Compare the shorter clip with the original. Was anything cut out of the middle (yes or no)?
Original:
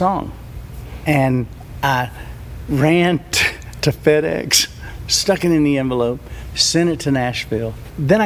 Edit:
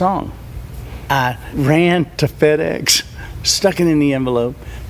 yes